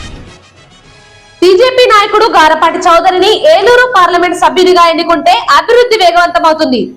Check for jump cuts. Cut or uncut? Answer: cut